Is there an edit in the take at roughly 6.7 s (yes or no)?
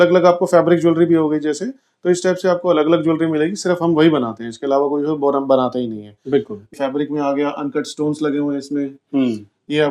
yes